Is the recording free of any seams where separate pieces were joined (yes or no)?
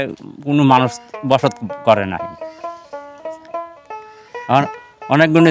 yes